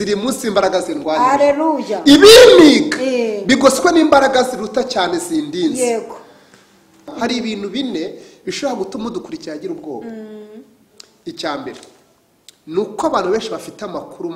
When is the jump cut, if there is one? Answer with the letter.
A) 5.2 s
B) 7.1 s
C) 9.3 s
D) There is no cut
B